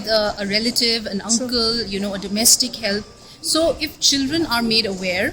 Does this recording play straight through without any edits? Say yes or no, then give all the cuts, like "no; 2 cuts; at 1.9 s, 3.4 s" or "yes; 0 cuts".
yes; 0 cuts